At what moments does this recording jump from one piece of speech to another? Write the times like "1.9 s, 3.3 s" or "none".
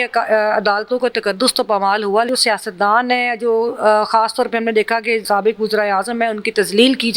2.3 s, 5.2 s